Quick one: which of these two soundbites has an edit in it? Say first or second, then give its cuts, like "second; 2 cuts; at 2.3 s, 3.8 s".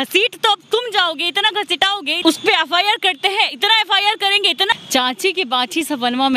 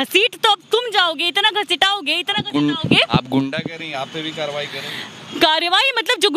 first; 2 cuts; at 2.1 s, 4.7 s